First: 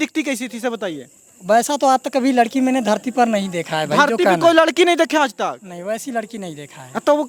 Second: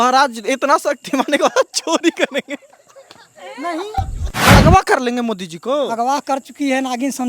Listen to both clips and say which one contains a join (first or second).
second